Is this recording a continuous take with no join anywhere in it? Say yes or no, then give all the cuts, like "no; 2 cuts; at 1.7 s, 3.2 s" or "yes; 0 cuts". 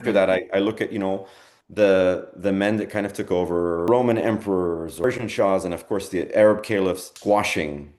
no; 3 cuts; at 3.9 s, 5.0 s, 7.1 s